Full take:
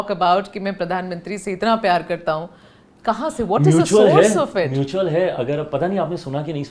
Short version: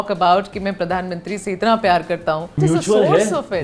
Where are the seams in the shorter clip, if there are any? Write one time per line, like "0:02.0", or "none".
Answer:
0:02.6